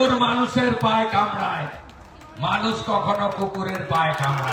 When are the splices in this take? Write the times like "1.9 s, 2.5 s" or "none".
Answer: none